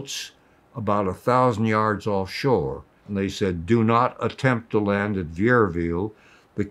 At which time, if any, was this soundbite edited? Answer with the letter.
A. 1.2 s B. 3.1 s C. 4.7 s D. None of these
B